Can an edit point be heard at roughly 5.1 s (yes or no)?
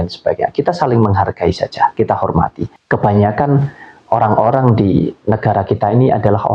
no